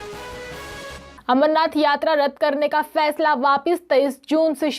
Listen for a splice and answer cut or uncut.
cut